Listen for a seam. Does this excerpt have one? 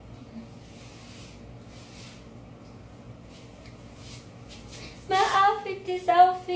no; 0 cuts

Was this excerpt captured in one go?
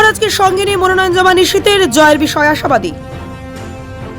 no; 1 cut; at 2.9 s

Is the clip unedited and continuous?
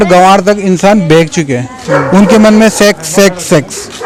yes; 0 cuts

